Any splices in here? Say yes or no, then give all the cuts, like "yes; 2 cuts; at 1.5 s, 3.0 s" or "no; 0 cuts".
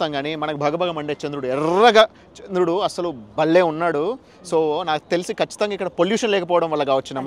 no; 0 cuts